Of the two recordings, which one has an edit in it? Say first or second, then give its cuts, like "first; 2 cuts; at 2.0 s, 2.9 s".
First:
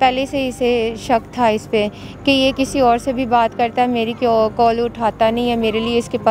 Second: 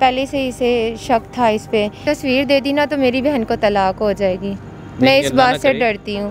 second; 1 cut; at 2.0 s